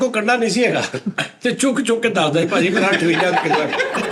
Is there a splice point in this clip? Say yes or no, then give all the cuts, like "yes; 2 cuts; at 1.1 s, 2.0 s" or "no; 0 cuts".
no; 0 cuts